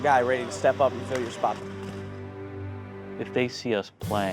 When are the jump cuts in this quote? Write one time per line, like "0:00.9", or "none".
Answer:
0:01.5